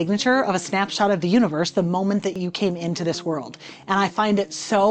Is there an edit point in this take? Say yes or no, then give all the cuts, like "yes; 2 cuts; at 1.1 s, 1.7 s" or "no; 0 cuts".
yes; 1 cut; at 2.4 s